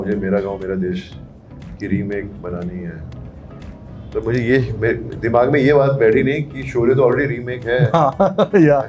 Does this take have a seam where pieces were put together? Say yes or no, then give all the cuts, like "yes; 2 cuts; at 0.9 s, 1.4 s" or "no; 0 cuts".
no; 0 cuts